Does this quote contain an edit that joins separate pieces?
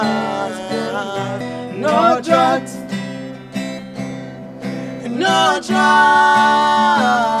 yes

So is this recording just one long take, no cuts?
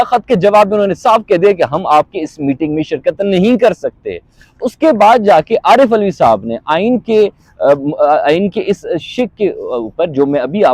yes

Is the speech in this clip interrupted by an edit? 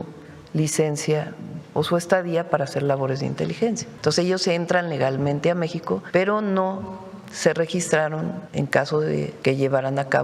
yes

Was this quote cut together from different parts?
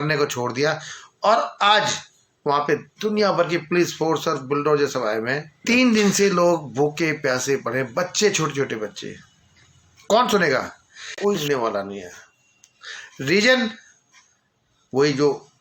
yes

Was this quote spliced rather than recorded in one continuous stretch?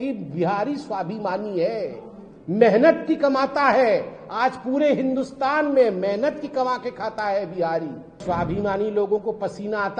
yes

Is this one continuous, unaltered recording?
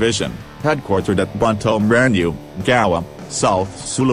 no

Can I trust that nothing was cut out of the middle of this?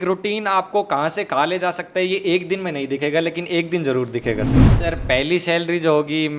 no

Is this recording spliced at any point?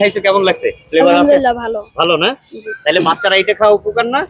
no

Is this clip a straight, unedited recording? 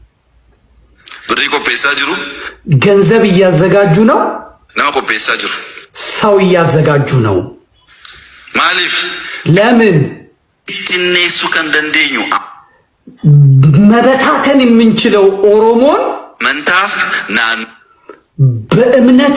yes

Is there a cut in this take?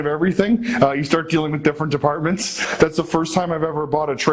yes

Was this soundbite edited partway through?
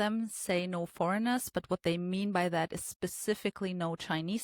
no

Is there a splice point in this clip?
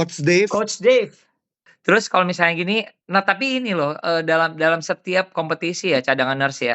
yes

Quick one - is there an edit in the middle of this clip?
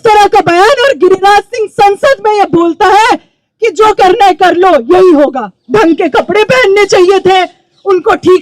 yes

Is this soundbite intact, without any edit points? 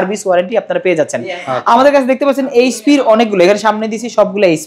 yes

